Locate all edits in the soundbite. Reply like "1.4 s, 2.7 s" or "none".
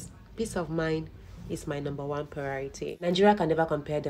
3.1 s